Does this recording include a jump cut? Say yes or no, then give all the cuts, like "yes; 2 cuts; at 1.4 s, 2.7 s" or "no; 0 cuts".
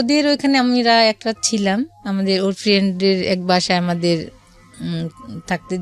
no; 0 cuts